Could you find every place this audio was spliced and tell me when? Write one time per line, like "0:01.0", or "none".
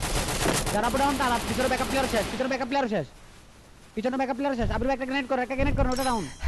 none